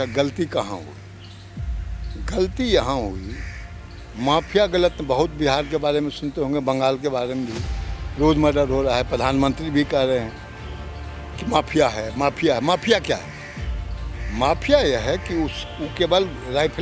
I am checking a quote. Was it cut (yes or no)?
no